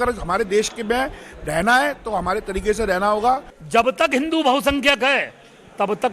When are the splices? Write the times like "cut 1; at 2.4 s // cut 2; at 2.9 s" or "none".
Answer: cut 1; at 3.5 s